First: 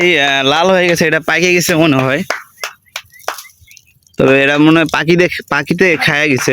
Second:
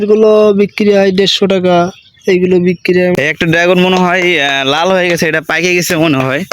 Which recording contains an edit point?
second; 1 cut; at 3.2 s

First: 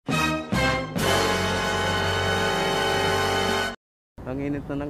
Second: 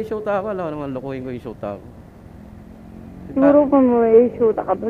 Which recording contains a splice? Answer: first; 1 cut; at 3.8 s

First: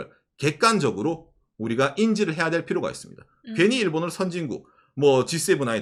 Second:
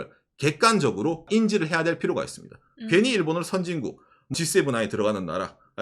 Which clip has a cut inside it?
second; 2 cuts; at 1.3 s, 4.3 s

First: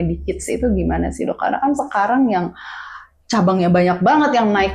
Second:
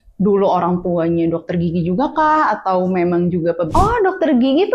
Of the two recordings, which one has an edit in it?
second; 1 cut; at 3.6 s

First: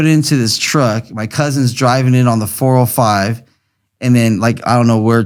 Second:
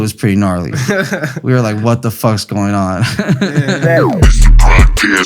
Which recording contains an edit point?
second; 1 cut; at 3.8 s

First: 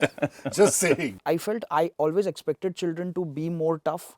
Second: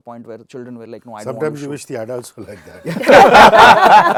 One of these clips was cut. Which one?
first; 1 cut; at 1.1 s

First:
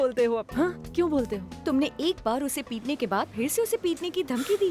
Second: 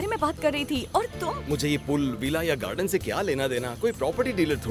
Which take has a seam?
first; 1 cut; at 1.5 s

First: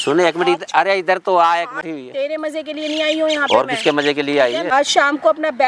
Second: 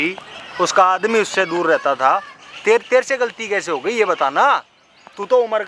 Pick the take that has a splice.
first; 2 cuts; at 1.9 s, 4.7 s

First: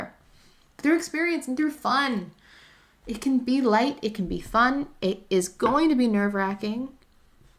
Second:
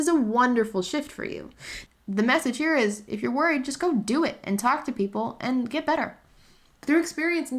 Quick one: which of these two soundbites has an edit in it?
second; 1 cut; at 1.8 s

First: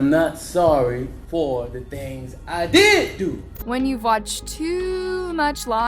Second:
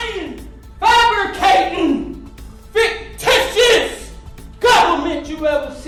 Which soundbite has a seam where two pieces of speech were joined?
first; 1 cut; at 3.5 s

